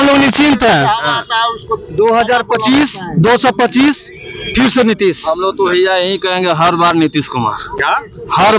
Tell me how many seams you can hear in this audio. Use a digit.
0